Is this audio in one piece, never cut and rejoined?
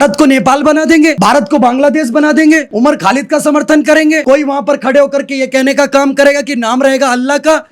no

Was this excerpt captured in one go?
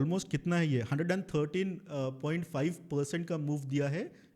yes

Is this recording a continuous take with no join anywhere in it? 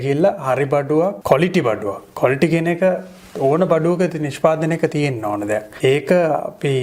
no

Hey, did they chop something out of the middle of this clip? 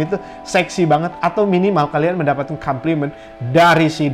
no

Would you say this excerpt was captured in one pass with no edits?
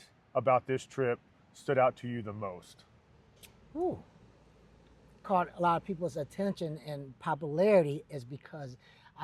no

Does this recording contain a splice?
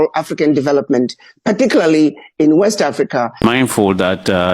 yes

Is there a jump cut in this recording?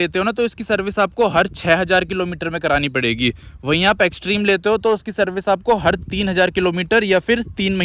no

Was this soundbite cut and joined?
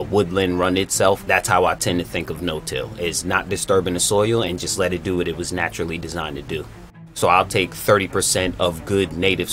yes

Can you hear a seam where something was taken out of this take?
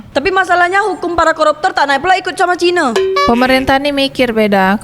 yes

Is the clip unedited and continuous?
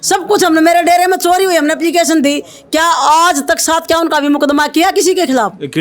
yes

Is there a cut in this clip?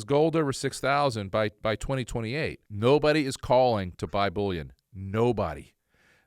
yes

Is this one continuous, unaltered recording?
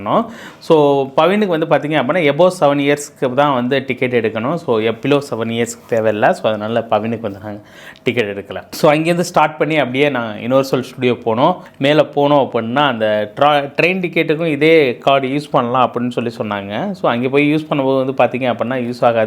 yes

